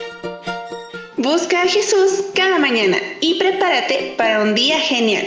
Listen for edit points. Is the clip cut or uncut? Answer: cut